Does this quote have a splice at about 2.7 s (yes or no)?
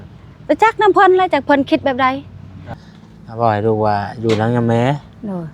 yes